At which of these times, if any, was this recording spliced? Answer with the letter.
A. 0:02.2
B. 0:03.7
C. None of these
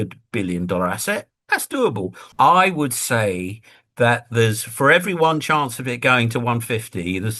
A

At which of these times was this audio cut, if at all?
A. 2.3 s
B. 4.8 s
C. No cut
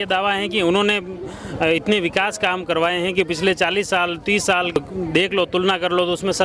B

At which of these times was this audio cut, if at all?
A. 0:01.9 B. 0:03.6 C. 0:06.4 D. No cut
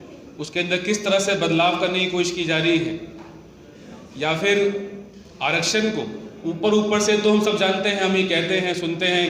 C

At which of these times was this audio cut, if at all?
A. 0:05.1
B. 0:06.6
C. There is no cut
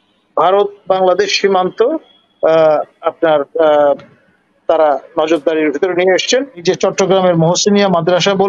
B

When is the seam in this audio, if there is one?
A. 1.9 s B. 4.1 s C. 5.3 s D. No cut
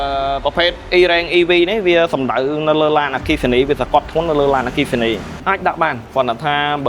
C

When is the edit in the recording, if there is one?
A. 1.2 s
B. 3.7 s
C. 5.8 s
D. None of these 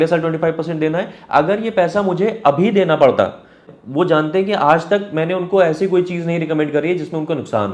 B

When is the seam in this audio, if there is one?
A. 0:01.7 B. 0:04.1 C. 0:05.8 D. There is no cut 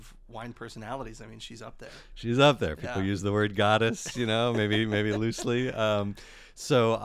D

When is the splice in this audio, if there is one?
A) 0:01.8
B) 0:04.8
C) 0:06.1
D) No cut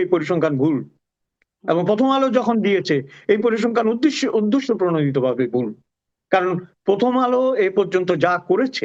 D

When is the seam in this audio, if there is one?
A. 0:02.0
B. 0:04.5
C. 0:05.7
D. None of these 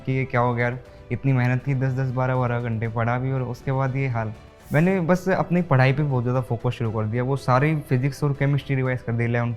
B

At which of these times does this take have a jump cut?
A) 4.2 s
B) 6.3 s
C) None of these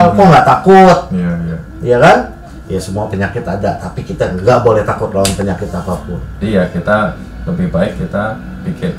B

